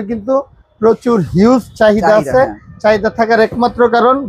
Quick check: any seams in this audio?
no; 0 cuts

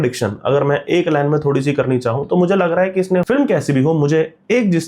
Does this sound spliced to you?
yes; 1 cut; at 3.2 s

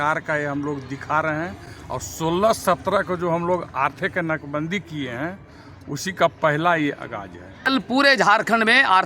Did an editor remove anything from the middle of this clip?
yes; 1 cut; at 7.7 s

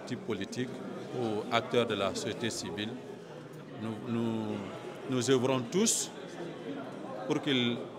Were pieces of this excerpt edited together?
no; 0 cuts

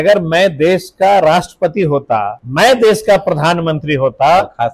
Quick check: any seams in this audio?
yes; 1 cut; at 2.4 s

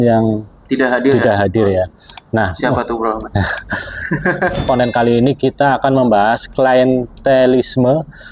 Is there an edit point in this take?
yes; 1 cut; at 4.7 s

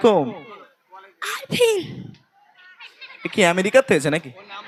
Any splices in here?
no; 0 cuts

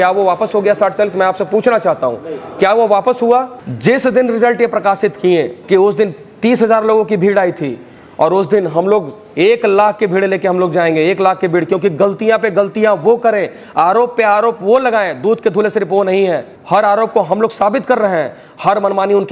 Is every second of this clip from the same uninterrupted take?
no; 3 cuts; at 3.6 s, 5.6 s, 16.5 s

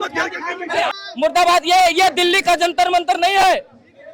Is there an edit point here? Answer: yes; 1 cut; at 1.0 s

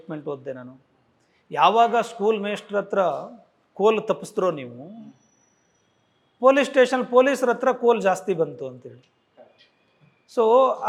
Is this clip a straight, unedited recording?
yes; 0 cuts

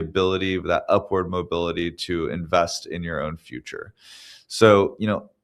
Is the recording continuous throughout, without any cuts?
yes; 0 cuts

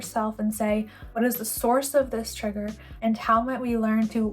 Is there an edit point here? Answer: yes; 2 cuts; at 1.0 s, 2.8 s

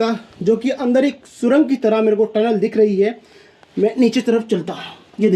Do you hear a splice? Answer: no; 0 cuts

